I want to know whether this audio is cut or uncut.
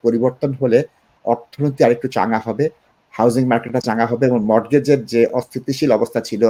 uncut